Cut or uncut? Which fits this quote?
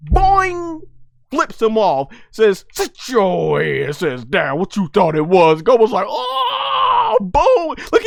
uncut